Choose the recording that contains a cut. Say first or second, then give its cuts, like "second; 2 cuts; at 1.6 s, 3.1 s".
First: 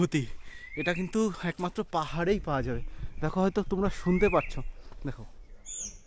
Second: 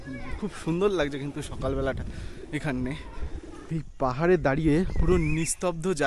second; 1 cut; at 3.5 s